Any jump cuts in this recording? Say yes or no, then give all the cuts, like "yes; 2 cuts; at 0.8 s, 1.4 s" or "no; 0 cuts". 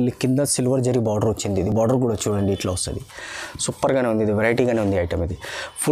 no; 0 cuts